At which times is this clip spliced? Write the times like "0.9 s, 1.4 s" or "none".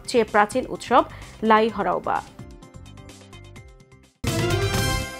4.2 s